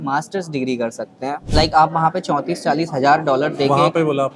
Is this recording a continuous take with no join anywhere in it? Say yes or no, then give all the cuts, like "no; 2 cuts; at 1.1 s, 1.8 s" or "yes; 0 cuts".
yes; 0 cuts